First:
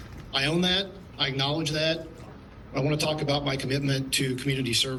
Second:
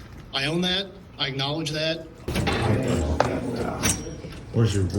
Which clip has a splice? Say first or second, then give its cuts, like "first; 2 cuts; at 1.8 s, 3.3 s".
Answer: second; 1 cut; at 2.2 s